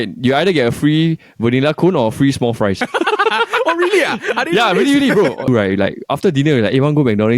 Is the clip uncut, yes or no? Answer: no